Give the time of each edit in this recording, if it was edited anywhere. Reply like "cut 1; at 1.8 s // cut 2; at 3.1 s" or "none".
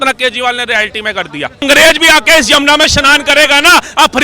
cut 1; at 1.6 s